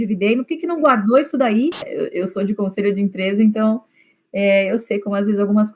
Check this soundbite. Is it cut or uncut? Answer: cut